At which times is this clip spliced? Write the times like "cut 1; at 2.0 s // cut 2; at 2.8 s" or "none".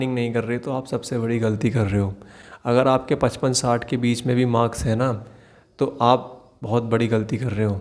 none